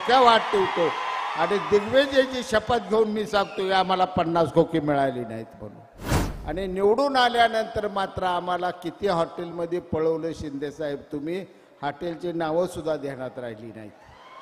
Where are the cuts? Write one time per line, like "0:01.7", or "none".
0:06.3